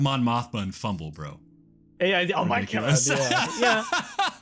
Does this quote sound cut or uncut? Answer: uncut